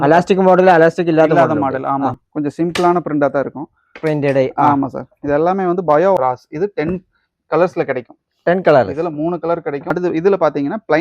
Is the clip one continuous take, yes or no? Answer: no